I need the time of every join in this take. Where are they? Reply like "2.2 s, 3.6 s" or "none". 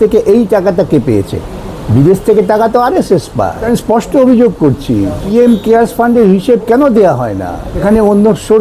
3.7 s, 5.3 s, 7.8 s